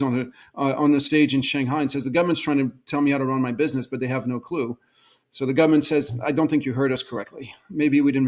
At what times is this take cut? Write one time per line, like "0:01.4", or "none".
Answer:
none